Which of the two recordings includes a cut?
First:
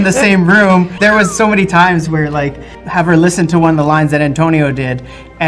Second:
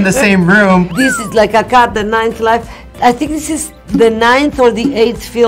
second; 1 cut; at 0.9 s

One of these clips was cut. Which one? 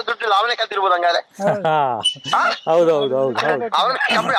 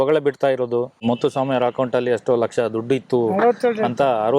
second; 1 cut; at 1.0 s

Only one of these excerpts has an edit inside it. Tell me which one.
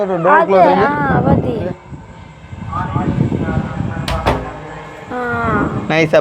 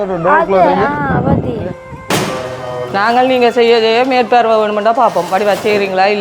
second; 1 cut; at 2.1 s

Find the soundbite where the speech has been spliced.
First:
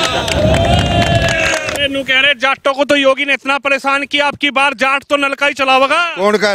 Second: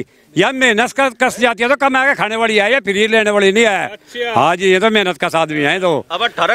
first; 1 cut; at 1.7 s

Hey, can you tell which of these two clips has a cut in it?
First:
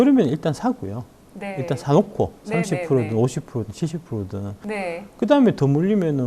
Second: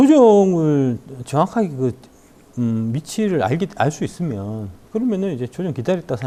first; 1 cut; at 4.6 s

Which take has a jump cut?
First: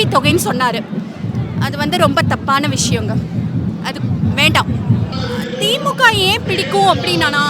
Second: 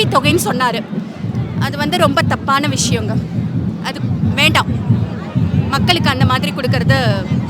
first; 1 cut; at 5.1 s

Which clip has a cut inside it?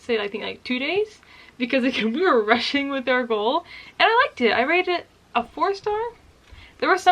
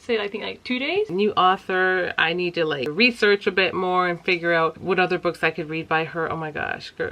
second; 3 cuts; at 1.1 s, 2.9 s, 4.8 s

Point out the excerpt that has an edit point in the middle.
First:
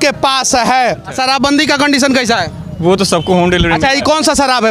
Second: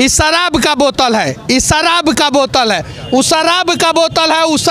first; 1 cut; at 1.1 s

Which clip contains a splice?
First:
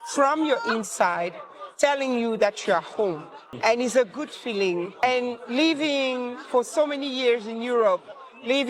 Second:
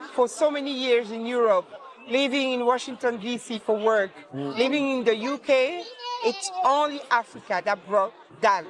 first; 2 cuts; at 3.5 s, 5.0 s

